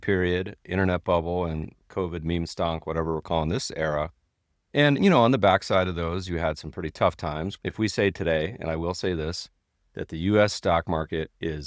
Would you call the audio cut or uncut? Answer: cut